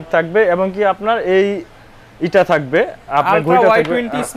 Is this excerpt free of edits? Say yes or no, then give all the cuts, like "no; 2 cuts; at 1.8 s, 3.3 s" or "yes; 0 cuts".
yes; 0 cuts